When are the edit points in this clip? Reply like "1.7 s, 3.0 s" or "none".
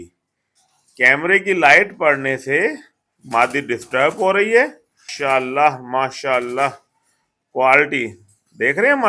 5.1 s

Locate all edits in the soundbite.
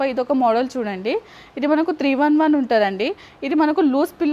none

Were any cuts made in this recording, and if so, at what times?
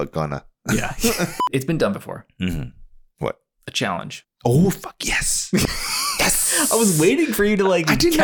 1.4 s, 4.2 s

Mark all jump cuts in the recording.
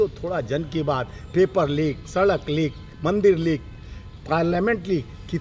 none

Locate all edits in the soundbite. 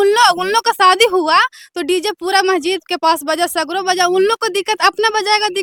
none

